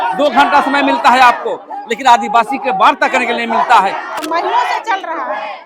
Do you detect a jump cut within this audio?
yes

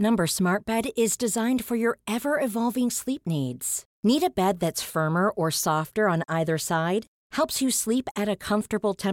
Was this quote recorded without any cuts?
yes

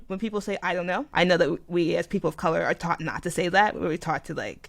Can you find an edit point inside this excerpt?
yes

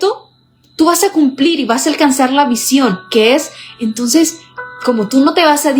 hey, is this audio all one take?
yes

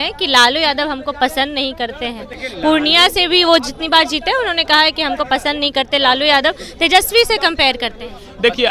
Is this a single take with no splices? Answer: yes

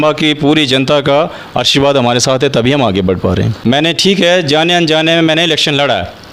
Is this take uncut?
no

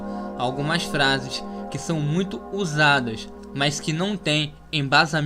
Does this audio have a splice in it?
yes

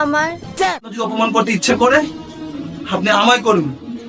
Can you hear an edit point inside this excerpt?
yes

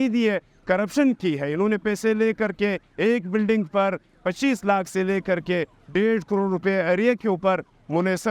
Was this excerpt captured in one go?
yes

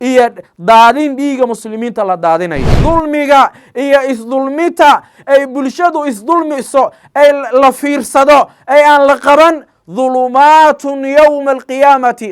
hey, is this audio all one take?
no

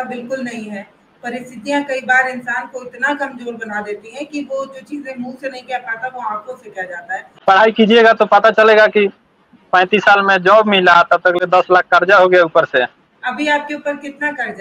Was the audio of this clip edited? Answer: yes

